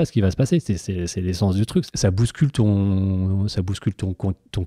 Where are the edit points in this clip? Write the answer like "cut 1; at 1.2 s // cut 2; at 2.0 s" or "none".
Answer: cut 1; at 1.9 s